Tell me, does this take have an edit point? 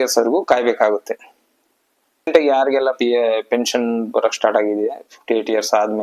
yes; 1 cut; at 2.3 s

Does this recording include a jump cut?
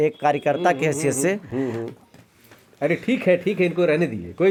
no; 0 cuts

